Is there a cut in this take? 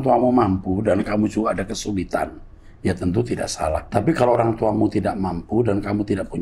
yes; 1 cut; at 3.9 s

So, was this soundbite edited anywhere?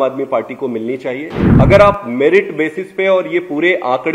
yes; 1 cut; at 1.4 s

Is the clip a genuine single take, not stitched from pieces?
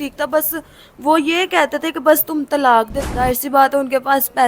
no; 1 cut; at 2.9 s

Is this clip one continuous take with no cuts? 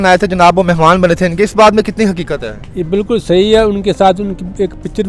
yes; 0 cuts

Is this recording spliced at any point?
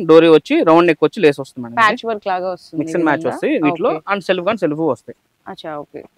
no; 0 cuts

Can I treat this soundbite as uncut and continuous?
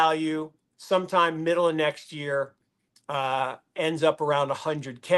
yes; 0 cuts

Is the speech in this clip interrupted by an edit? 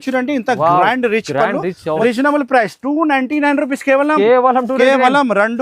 yes; 1 cut; at 2.0 s

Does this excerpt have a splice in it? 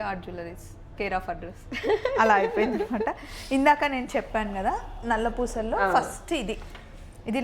no; 0 cuts

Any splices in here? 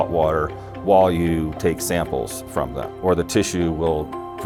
no; 0 cuts

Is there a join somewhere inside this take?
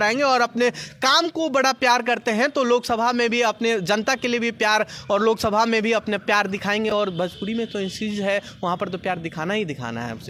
no; 0 cuts

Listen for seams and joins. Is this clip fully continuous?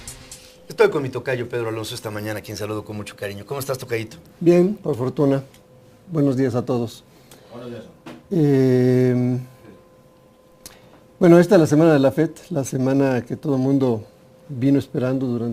yes; 0 cuts

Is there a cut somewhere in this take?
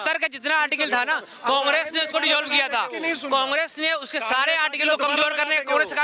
no; 0 cuts

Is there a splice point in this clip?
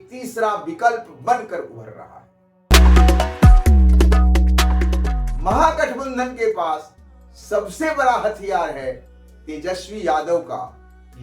yes; 1 cut; at 2.7 s

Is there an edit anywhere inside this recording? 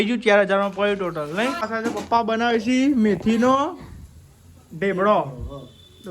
yes; 1 cut; at 1.7 s

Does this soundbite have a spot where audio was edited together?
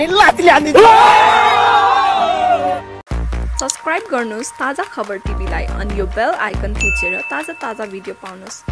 yes; 1 cut; at 2.9 s

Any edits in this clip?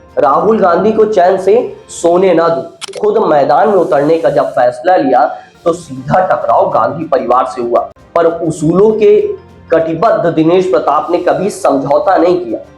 yes; 2 cuts; at 2.9 s, 8.0 s

